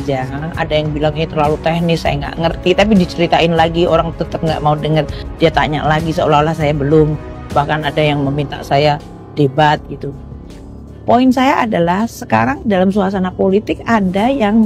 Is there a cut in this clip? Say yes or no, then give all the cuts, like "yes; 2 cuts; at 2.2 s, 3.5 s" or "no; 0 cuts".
no; 0 cuts